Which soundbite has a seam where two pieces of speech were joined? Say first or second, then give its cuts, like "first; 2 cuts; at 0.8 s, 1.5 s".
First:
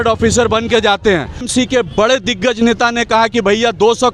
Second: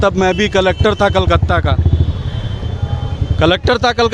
first; 1 cut; at 1.5 s